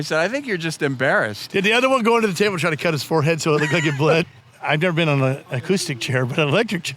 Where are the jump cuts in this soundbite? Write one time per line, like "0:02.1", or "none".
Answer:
0:04.3

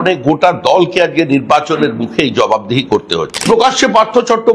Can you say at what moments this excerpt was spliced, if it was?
0:03.4

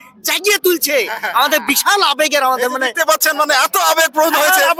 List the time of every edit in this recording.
none

